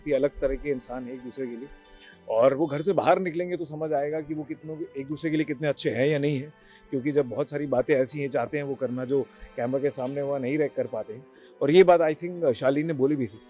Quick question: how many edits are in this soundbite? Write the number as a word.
zero